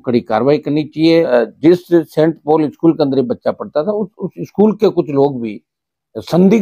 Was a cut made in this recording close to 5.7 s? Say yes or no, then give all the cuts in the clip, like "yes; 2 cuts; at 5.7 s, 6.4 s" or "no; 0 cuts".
no; 1 cut; at 1.3 s